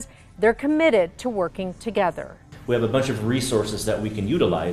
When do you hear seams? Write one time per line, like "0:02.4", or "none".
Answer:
0:02.4